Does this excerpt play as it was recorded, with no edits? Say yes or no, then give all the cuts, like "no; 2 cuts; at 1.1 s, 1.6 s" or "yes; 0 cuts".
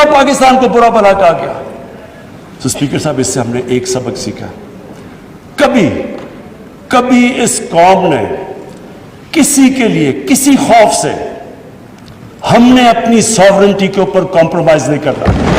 yes; 0 cuts